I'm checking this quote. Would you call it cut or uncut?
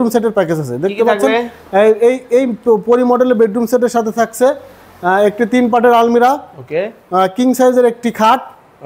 uncut